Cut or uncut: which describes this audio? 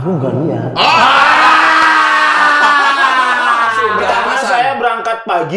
cut